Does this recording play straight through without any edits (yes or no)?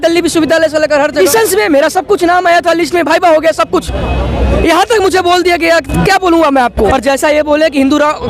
no